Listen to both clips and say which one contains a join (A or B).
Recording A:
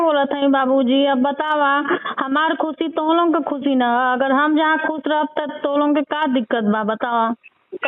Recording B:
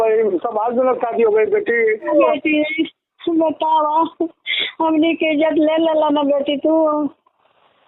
B